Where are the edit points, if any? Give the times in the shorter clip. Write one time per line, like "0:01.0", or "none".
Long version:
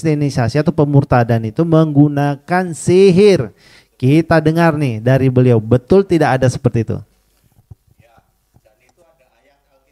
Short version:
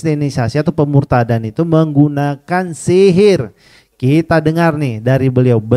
none